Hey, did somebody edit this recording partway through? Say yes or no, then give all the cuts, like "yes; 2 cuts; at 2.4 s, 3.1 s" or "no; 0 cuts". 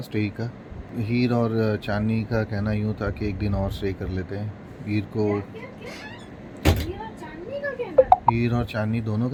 no; 0 cuts